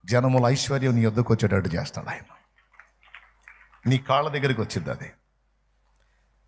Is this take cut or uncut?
uncut